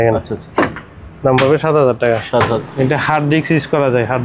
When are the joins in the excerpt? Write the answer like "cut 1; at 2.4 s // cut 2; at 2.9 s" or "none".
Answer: cut 1; at 2.7 s